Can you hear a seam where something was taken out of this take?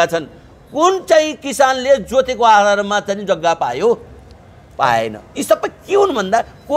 no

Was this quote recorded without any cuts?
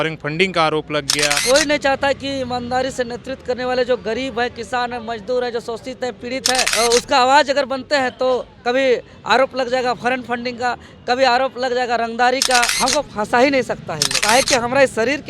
no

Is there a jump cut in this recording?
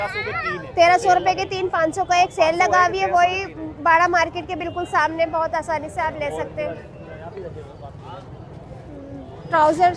no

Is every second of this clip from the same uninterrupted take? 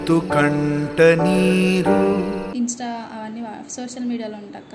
no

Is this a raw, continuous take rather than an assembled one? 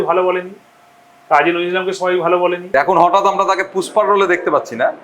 no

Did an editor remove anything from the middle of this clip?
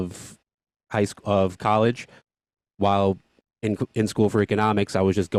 no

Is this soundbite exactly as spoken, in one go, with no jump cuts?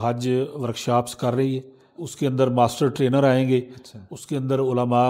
no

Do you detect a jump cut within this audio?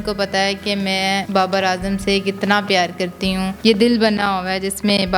yes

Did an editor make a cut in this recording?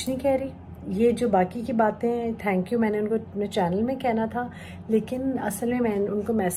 no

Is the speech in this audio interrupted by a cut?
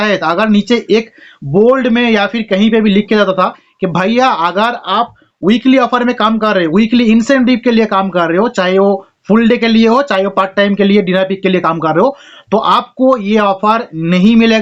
no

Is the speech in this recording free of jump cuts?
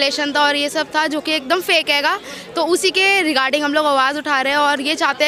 yes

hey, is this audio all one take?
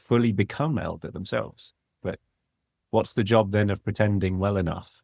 no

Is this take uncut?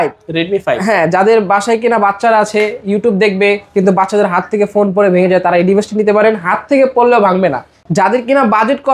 no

